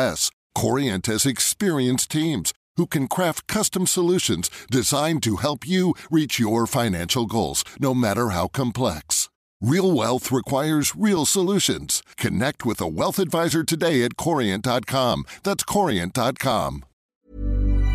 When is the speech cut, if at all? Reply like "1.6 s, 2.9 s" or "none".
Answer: 16.9 s

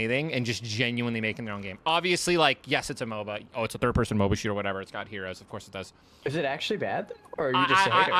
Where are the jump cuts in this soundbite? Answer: 6.2 s

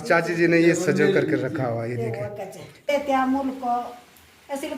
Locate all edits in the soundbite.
2.9 s

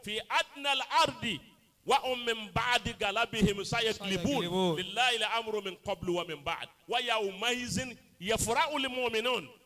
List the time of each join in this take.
none

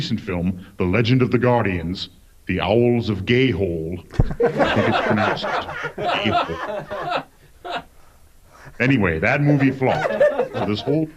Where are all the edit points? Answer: none

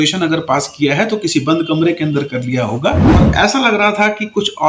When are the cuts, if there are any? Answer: 3.1 s

